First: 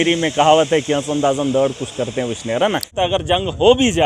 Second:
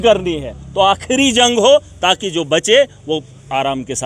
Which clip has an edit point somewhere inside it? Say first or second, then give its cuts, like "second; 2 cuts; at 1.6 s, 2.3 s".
first; 1 cut; at 3.1 s